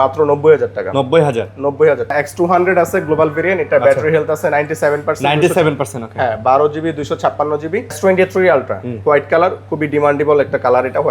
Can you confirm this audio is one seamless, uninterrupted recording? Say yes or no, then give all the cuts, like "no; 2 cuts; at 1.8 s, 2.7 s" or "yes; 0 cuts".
no; 2 cuts; at 2.1 s, 8.0 s